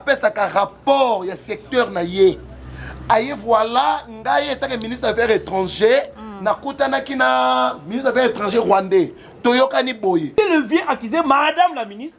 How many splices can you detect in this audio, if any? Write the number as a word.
one